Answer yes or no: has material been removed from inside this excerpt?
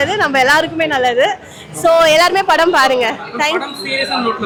no